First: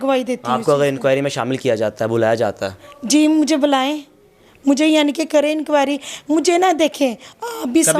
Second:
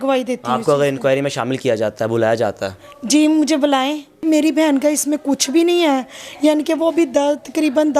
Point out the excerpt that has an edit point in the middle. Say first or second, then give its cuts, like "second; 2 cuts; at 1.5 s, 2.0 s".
second; 1 cut; at 4.2 s